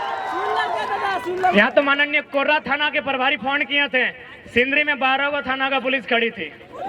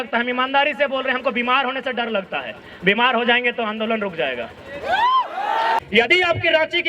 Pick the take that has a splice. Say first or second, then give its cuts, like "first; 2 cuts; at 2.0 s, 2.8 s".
second; 1 cut; at 5.8 s